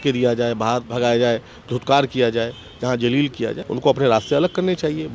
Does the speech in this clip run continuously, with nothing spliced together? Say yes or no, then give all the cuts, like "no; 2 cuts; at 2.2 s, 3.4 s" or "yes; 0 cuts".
no; 2 cuts; at 0.9 s, 3.6 s